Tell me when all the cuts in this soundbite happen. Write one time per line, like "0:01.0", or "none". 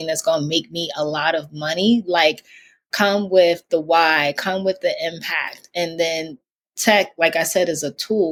none